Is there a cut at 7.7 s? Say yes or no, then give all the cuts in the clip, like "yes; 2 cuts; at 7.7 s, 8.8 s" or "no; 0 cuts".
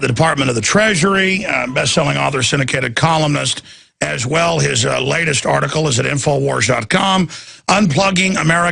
no; 0 cuts